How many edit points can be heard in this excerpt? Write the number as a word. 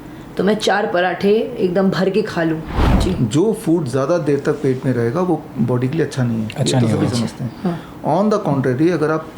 one